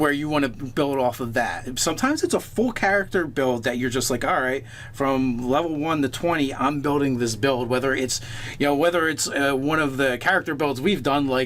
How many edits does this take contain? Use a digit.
1